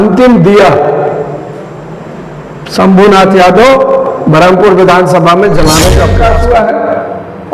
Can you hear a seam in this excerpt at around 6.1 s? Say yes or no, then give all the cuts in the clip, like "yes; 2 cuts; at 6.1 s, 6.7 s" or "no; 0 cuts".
yes; 1 cut; at 6.1 s